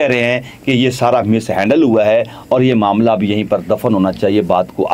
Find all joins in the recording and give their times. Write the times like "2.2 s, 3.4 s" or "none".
none